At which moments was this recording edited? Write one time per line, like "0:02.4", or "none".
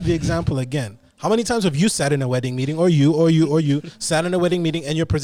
none